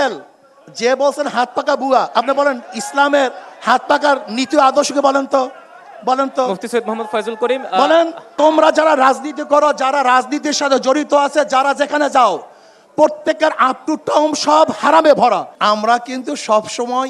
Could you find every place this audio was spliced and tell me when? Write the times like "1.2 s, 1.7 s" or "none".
8.3 s, 15.5 s